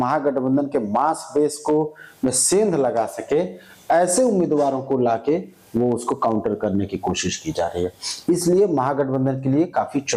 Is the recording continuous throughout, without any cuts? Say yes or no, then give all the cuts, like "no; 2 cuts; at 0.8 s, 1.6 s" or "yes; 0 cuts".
yes; 0 cuts